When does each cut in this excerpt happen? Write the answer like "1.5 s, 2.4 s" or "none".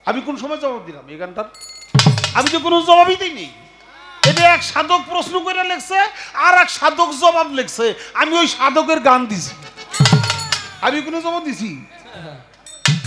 none